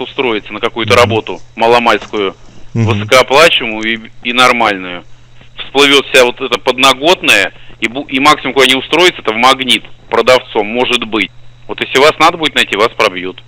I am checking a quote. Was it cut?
yes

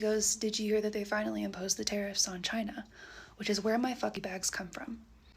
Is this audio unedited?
no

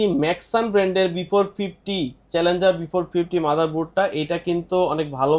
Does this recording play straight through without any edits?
yes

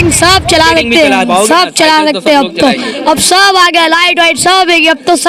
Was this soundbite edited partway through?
no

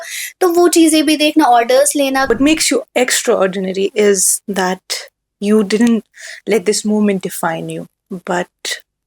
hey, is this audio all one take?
no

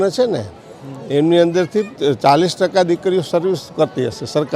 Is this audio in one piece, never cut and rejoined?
no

